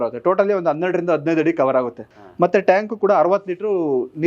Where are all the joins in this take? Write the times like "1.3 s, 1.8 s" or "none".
2.2 s